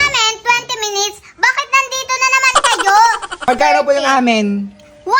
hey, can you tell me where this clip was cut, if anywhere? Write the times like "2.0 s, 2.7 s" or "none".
3.4 s